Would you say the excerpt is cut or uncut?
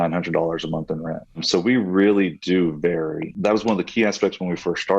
cut